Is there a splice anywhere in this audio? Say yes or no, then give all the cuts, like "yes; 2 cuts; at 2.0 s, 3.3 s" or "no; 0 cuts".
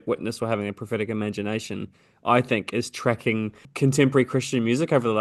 yes; 1 cut; at 3.6 s